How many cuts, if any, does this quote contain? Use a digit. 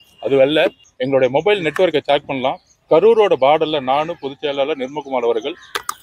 2